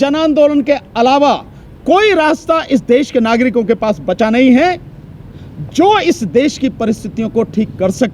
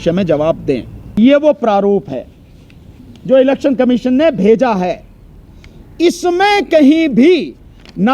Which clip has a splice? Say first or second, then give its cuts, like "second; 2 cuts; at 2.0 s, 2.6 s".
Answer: second; 1 cut; at 1.0 s